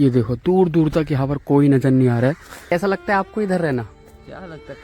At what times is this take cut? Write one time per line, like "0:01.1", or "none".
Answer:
0:02.7